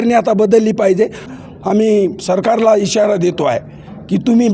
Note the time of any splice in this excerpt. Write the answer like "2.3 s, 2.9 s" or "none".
1.3 s